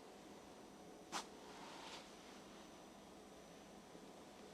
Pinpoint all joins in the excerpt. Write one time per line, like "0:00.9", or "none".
none